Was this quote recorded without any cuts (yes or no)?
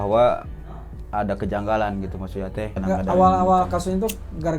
no